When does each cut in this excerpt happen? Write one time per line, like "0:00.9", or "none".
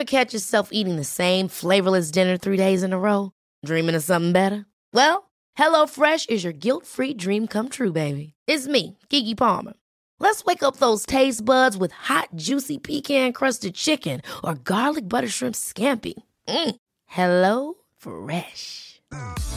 none